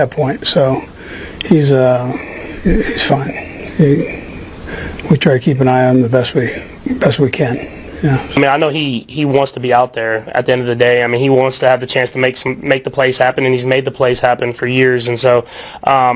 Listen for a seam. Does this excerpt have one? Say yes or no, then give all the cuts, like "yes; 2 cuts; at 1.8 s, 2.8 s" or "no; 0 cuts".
yes; 1 cut; at 8.4 s